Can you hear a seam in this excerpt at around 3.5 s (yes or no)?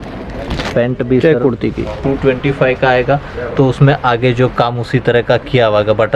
no